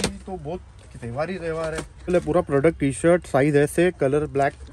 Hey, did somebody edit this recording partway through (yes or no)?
yes